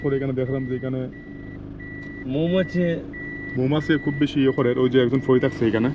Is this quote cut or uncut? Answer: uncut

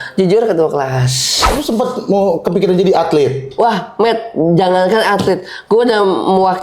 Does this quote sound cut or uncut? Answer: cut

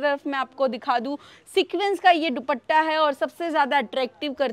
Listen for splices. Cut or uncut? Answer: uncut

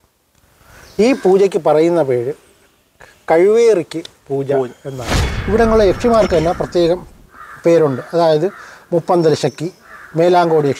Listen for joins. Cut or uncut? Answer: cut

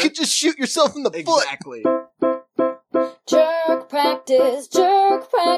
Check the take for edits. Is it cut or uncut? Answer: cut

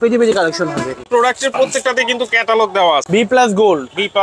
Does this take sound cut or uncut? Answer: cut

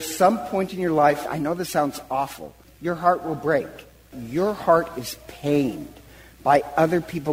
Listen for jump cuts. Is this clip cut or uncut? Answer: cut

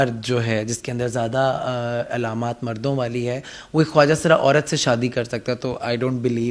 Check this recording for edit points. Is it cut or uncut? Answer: uncut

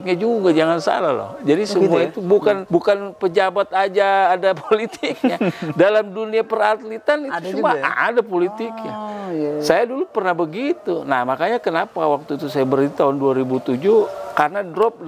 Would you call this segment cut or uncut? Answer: cut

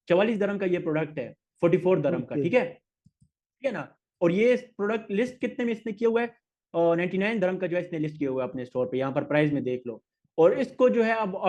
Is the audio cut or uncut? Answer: uncut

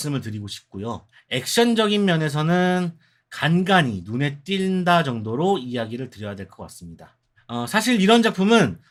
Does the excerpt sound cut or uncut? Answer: uncut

